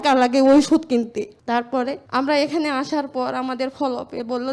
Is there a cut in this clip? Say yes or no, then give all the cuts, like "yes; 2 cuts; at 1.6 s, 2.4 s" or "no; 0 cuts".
yes; 1 cut; at 2.0 s